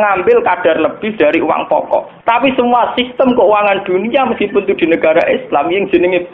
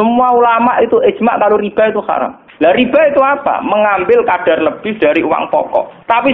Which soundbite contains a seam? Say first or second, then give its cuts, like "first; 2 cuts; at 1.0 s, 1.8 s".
second; 1 cut; at 2.4 s